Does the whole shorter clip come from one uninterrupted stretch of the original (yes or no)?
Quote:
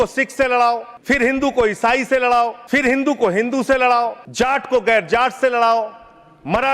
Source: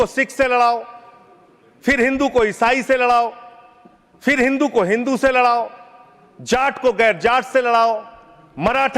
no